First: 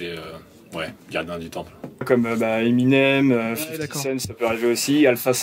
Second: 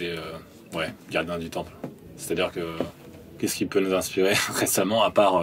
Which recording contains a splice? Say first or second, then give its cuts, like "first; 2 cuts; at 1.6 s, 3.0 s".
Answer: first; 1 cut; at 2.0 s